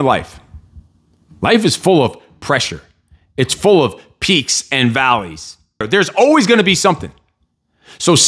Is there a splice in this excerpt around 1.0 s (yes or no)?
no